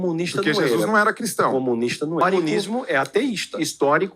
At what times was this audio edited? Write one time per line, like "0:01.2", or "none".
0:02.2